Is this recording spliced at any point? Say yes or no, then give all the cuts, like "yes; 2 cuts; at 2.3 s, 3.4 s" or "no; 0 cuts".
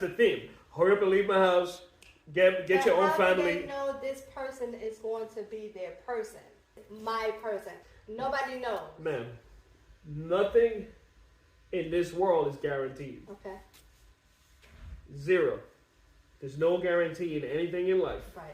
yes; 2 cuts; at 6.9 s, 7.8 s